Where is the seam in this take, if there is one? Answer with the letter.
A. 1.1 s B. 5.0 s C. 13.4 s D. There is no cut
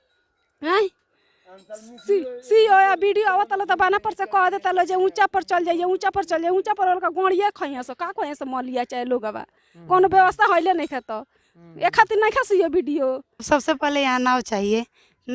C